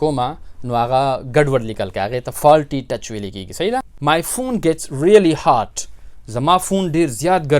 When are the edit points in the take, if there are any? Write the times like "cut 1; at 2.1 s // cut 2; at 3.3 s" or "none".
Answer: cut 1; at 3.9 s